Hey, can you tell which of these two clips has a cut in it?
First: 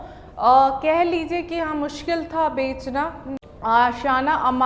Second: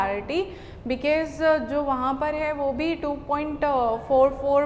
first; 1 cut; at 3.3 s

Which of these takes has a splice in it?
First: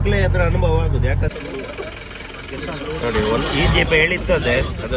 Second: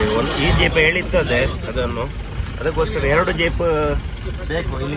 first; 1 cut; at 1.3 s

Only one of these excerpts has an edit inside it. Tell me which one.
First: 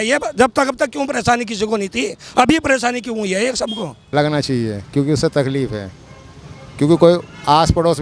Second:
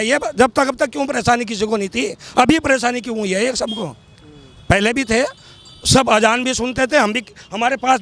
first; 1 cut; at 3.9 s

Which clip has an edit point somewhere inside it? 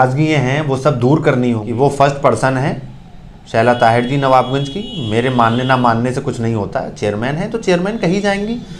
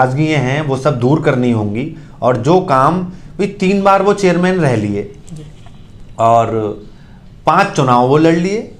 first; 1 cut; at 1.6 s

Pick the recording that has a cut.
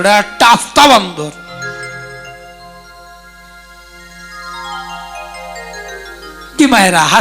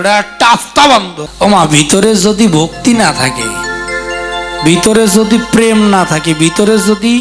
second; 1 cut; at 1.2 s

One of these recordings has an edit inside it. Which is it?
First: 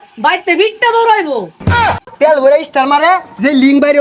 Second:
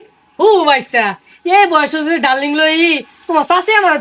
first; 1 cut; at 1.8 s

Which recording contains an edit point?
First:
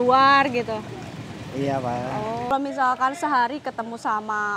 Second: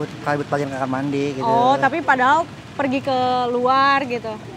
first; 1 cut; at 2.5 s

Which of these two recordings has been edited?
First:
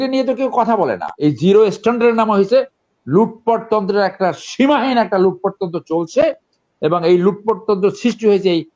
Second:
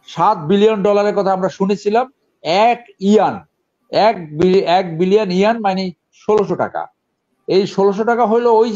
first; 1 cut; at 1.1 s

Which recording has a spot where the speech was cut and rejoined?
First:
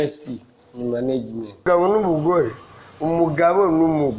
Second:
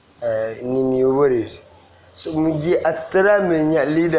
first; 1 cut; at 1.6 s

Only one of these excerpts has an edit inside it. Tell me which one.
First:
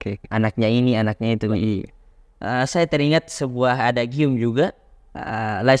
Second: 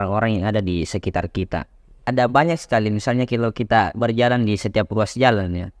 second; 1 cut; at 1.9 s

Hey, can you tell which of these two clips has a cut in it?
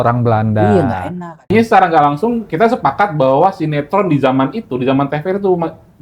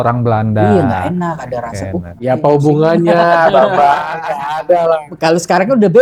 first; 1 cut; at 1.5 s

